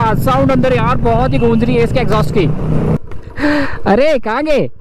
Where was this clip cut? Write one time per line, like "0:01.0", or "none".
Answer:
0:03.0